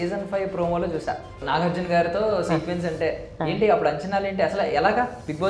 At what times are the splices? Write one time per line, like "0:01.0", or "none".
0:01.4

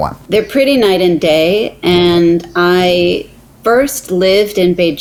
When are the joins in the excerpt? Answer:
none

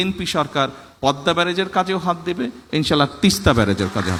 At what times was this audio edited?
none

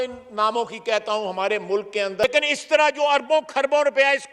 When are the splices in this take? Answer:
0:02.2

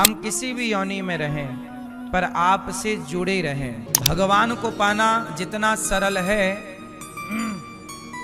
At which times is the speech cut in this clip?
0:03.9

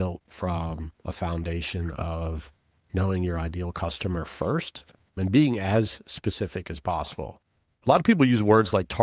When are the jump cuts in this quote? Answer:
none

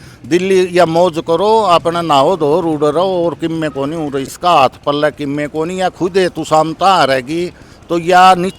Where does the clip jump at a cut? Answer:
0:04.3

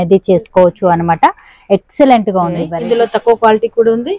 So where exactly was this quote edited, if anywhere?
0:02.7

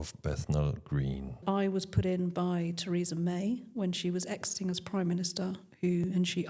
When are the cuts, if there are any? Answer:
0:01.4

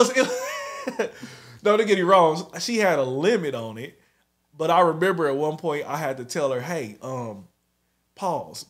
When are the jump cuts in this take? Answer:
none

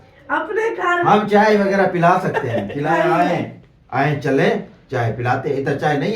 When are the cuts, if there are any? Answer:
0:02.9

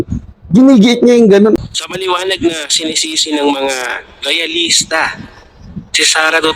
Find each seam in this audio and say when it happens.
0:01.5

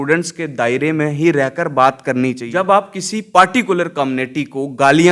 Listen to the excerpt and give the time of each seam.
0:02.4

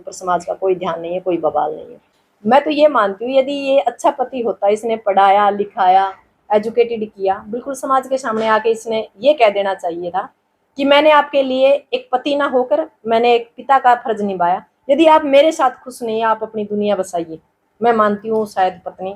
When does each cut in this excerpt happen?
0:02.2

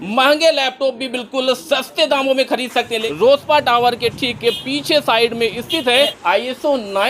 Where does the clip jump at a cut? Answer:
0:03.0
0:06.2

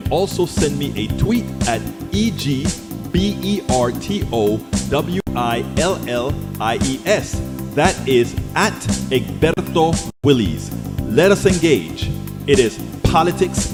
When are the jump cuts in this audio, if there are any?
none

